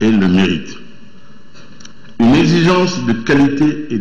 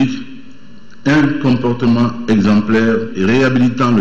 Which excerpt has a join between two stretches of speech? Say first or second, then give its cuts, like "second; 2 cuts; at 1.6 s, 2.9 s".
second; 1 cut; at 3.1 s